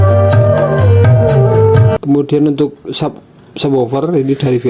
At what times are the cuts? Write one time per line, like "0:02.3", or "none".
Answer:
0:01.9